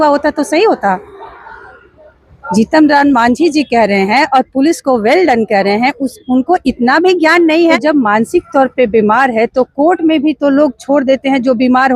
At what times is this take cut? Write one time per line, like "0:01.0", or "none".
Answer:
0:07.7